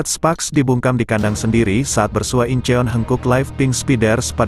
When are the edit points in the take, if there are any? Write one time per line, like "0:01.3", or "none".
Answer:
none